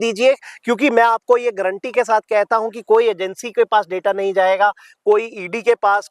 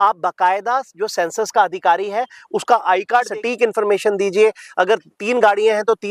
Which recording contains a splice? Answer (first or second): second